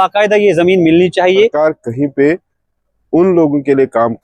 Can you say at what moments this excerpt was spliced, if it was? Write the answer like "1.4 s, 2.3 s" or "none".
1.5 s